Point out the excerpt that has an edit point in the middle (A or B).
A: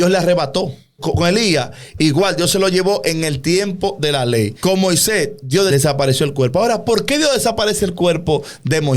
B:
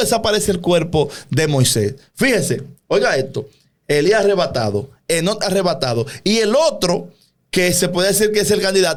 A